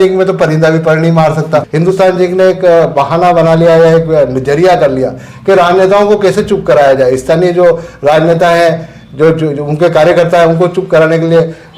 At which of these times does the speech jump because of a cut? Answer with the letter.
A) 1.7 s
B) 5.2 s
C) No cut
A